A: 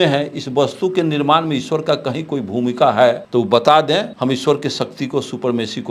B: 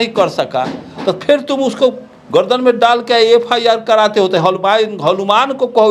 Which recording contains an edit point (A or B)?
A